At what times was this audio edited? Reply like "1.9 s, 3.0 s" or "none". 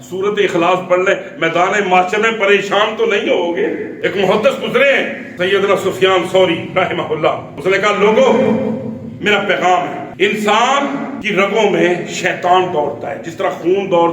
3.9 s, 5.2 s, 7.5 s, 10.0 s, 11.2 s